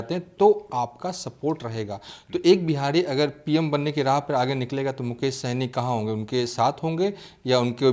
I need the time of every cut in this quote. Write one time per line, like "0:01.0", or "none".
none